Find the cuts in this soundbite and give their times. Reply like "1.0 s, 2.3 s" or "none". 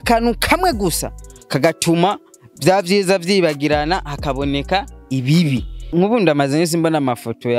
5.9 s